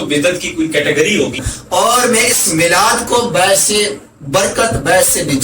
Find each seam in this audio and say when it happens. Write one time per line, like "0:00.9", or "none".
0:01.4